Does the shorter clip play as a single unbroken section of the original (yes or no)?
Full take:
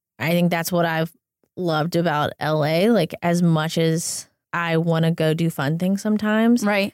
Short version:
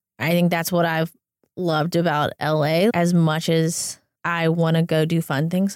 no